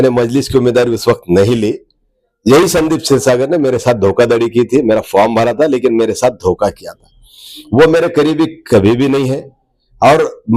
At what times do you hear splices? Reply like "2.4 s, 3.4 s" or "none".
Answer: none